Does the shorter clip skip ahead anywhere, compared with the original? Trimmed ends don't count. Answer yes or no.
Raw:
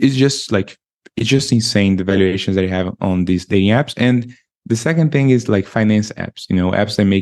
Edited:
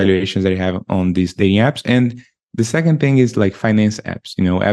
no